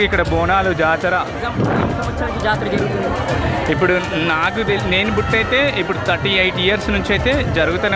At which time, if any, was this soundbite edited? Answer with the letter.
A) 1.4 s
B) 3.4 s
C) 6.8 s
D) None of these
A